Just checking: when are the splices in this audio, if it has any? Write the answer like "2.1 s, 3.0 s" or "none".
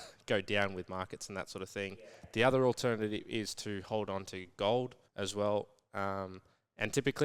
5.0 s